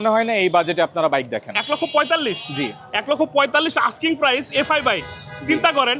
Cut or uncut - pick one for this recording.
uncut